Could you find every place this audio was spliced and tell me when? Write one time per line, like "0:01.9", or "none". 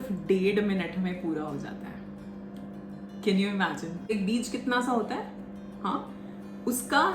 0:04.1

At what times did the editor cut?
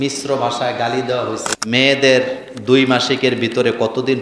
0:01.5

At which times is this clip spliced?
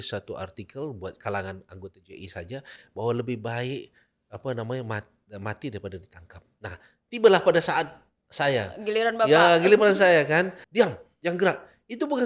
0:10.6

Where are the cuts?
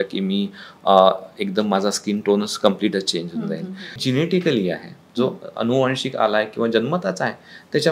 0:04.0

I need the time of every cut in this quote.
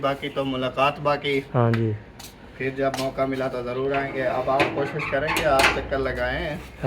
none

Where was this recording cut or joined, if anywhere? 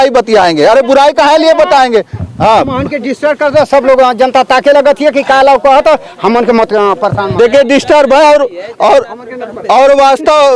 none

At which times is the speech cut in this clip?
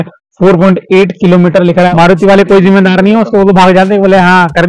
0:01.9

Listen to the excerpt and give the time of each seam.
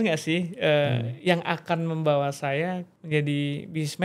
0:02.9

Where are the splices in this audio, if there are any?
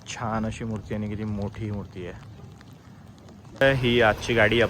0:03.6

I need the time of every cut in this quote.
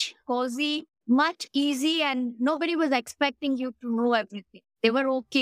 none

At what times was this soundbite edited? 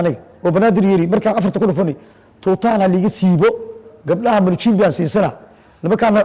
none

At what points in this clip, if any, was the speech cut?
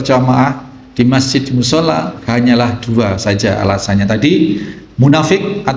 0:02.1

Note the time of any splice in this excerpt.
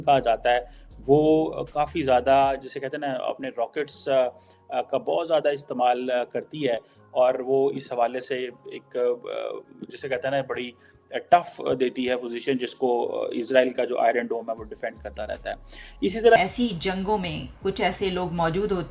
0:16.4

